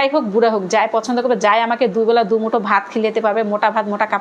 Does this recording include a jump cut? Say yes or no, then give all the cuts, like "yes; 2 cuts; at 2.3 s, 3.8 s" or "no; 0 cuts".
no; 0 cuts